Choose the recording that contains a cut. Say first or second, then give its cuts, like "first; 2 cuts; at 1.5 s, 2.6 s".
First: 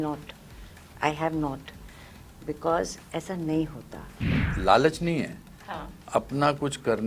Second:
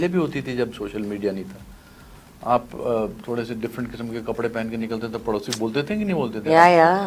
first; 1 cut; at 4.4 s